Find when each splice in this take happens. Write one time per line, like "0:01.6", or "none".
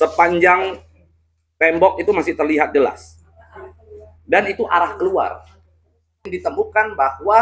0:06.3

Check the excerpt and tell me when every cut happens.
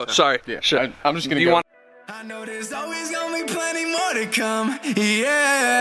0:01.6

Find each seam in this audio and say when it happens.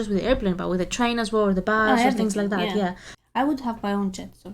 0:03.1

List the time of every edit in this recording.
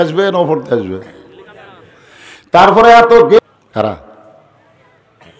0:03.4

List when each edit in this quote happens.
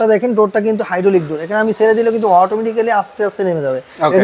none

